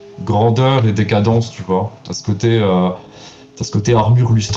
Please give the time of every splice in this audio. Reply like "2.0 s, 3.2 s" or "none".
none